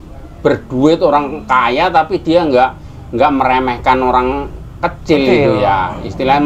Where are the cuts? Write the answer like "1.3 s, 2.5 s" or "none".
none

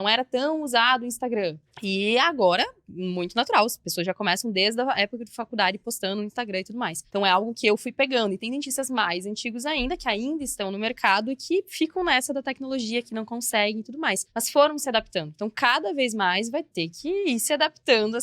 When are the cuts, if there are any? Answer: 1.7 s, 7.0 s, 14.3 s

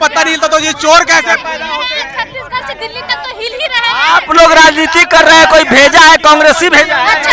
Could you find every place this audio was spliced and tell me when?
none

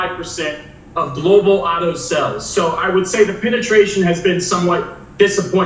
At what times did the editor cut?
none

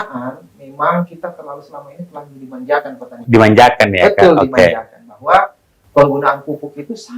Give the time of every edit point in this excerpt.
none

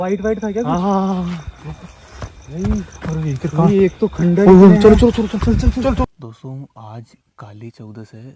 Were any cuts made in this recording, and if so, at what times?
6.0 s

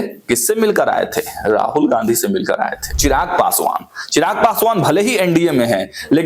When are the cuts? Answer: 2.8 s

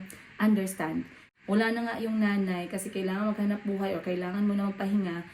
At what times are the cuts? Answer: 1.2 s

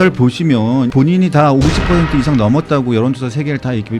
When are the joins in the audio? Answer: 0.9 s

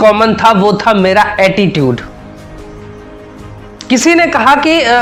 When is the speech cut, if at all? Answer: none

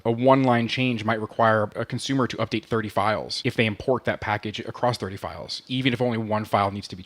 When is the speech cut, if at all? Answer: 3.3 s

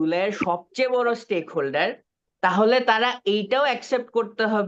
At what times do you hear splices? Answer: none

